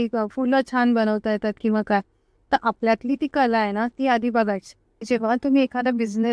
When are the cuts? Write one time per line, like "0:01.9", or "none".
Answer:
0:04.9